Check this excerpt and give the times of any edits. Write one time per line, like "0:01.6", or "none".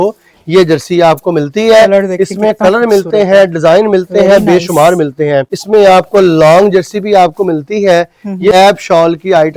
0:05.5
0:08.5